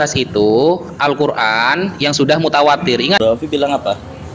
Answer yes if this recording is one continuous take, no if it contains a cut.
no